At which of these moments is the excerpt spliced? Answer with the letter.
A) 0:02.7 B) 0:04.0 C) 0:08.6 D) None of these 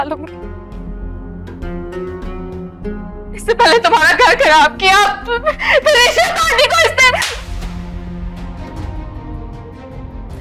C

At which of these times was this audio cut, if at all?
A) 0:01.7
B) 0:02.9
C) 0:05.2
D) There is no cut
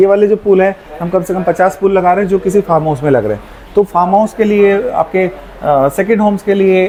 D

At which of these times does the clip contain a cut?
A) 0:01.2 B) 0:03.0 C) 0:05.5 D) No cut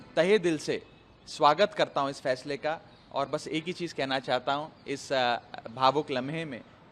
D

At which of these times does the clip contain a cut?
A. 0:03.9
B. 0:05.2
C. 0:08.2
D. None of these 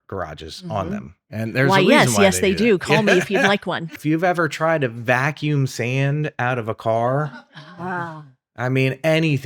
A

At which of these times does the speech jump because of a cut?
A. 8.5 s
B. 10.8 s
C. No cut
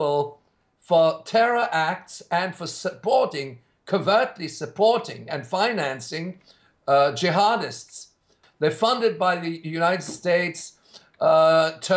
A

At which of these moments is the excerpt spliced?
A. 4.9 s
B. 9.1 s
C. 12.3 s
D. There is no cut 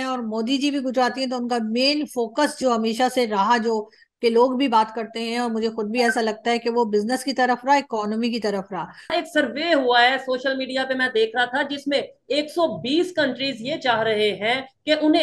B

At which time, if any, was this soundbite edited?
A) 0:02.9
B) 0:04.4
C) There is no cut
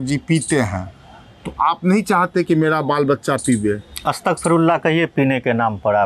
C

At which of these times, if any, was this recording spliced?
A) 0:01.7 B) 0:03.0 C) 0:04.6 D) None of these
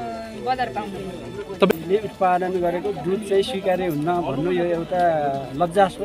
A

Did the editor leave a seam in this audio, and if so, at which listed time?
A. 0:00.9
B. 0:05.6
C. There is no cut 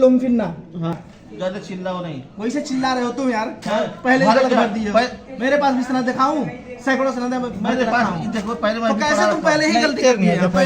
A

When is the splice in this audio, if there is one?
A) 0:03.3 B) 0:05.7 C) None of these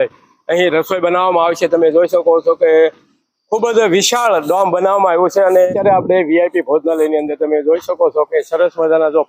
B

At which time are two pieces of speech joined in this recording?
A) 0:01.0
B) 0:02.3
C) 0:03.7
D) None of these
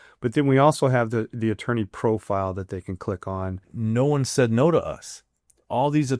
C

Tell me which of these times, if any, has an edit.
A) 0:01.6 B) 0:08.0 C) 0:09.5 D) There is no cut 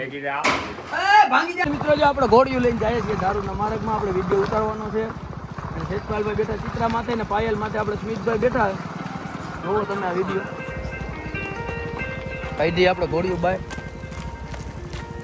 A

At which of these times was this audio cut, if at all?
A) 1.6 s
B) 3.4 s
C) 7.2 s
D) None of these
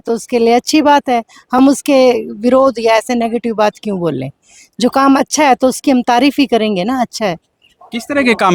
D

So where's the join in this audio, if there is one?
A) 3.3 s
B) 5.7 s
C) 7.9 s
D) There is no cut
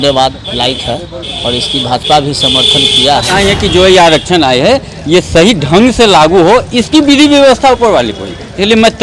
A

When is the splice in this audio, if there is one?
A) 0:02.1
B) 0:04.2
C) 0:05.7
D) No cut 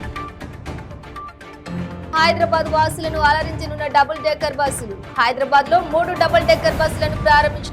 A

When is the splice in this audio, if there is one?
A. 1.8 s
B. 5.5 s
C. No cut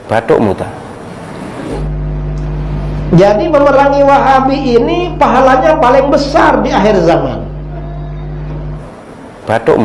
A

